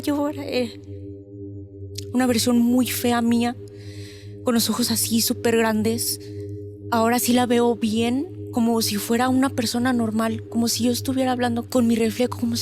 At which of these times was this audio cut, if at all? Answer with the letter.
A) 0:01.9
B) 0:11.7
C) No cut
B